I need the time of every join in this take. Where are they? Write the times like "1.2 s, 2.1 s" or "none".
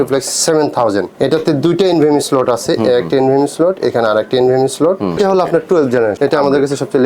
1.1 s, 5.2 s, 6.2 s